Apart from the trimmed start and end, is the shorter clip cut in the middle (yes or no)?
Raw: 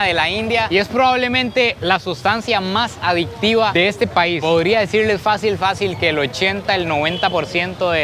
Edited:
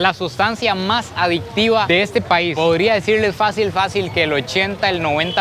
no